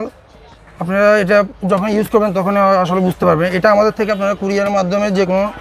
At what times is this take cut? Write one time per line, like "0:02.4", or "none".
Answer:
none